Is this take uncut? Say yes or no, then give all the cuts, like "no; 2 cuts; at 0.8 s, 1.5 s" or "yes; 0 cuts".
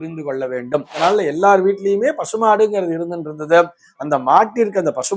no; 1 cut; at 0.9 s